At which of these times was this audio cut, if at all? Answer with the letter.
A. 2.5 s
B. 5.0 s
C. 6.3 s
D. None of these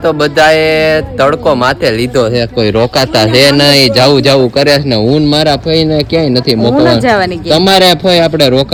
D